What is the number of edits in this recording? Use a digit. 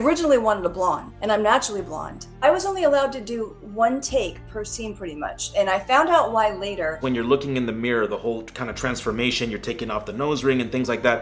3